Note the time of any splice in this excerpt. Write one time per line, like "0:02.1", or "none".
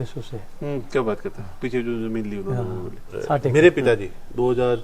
0:03.5